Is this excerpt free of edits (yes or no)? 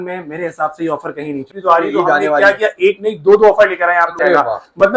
no